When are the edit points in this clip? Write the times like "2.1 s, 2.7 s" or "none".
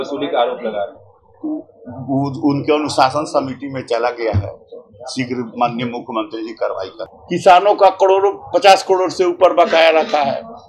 7.0 s